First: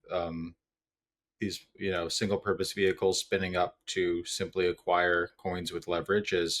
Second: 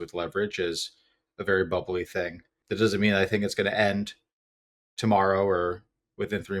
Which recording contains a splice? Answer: second; 1 cut; at 2.5 s

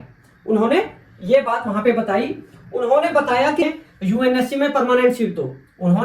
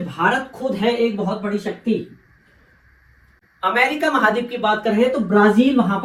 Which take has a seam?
first; 1 cut; at 3.6 s

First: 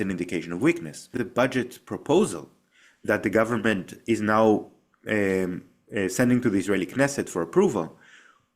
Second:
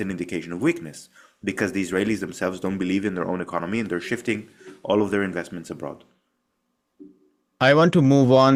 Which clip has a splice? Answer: first; 1 cut; at 1.2 s

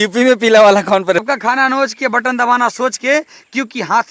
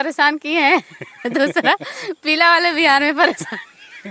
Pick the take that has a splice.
first; 1 cut; at 1.2 s

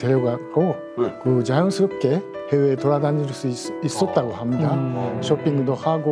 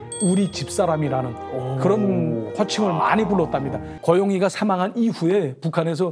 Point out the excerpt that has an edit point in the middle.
second; 1 cut; at 3.9 s

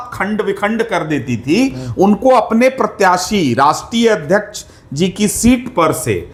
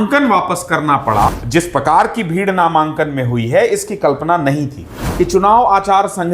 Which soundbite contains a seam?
second; 2 cuts; at 1.4 s, 5.0 s

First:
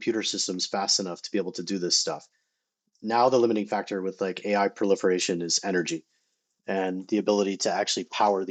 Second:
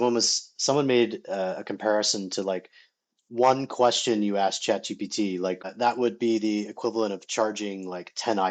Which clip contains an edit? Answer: second; 1 cut; at 5.7 s

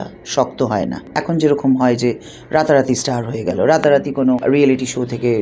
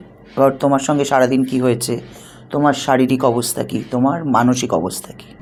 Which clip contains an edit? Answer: first; 2 cuts; at 1.1 s, 4.4 s

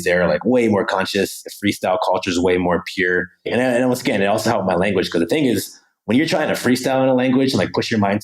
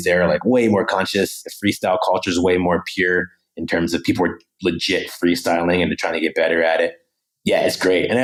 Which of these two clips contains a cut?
first; 1 cut; at 3.5 s

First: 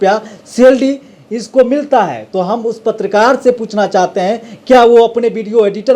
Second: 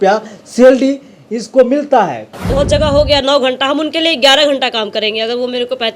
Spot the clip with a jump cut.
second; 1 cut; at 2.2 s

